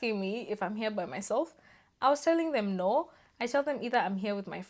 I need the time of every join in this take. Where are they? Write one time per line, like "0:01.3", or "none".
none

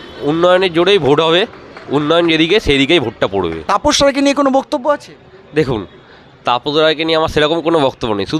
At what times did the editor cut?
0:03.6

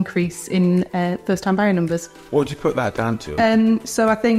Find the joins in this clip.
0:02.1
0:03.3

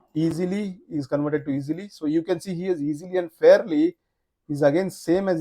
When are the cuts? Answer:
none

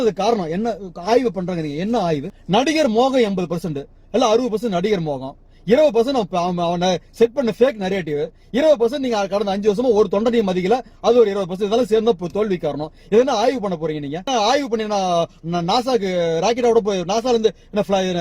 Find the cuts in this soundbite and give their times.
none

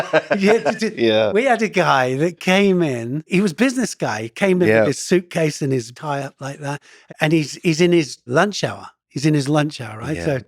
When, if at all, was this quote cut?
0:03.3
0:05.9
0:06.9
0:08.2

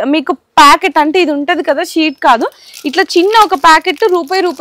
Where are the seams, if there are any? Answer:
none

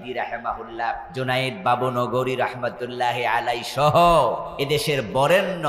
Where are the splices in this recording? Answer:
0:01.1
0:04.5

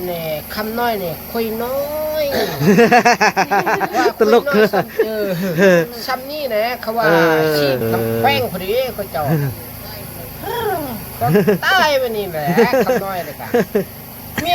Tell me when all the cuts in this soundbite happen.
0:07.8

